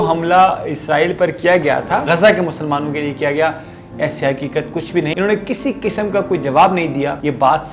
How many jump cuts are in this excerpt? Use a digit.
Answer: 2